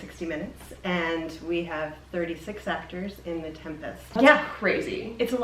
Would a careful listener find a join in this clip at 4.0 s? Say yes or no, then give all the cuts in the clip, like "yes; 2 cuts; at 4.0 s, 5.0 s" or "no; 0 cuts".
yes; 1 cut; at 4.0 s